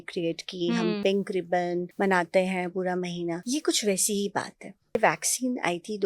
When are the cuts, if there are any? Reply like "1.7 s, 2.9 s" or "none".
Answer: 1.9 s, 3.4 s, 5.0 s